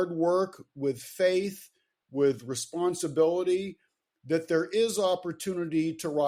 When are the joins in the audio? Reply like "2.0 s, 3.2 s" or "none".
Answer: none